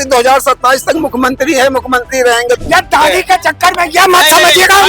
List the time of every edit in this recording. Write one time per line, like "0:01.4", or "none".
0:02.6